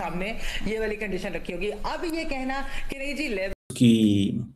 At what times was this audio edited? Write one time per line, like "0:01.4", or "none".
0:03.6